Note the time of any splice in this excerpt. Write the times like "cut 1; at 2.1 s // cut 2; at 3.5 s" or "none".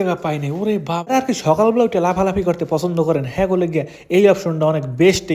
cut 1; at 1.1 s